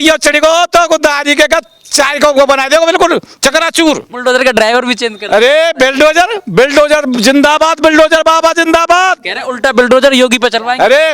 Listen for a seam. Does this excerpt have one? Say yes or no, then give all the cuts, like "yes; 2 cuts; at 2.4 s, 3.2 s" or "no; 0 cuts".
yes; 1 cut; at 4.1 s